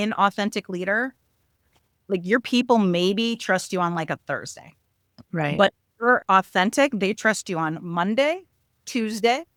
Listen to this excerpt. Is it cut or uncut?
uncut